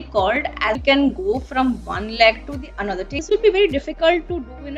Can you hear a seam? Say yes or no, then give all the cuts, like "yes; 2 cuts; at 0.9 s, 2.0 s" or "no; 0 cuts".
yes; 2 cuts; at 0.8 s, 3.2 s